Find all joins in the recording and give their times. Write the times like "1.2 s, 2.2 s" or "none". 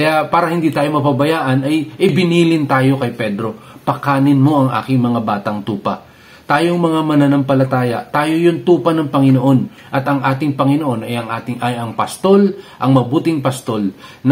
2.1 s